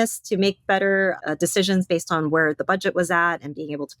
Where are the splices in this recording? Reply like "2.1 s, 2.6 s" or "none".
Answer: 1.2 s